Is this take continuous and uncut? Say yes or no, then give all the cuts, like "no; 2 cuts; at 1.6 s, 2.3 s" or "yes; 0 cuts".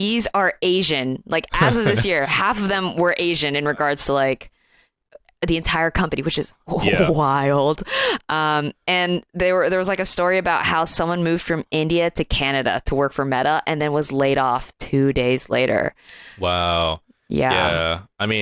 yes; 0 cuts